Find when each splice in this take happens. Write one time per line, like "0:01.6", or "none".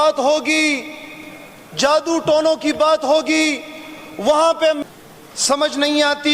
0:04.8